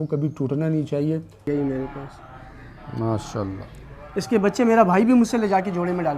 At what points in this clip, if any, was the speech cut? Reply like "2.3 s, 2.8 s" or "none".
1.4 s